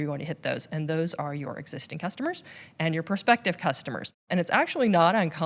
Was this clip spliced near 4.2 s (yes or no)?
yes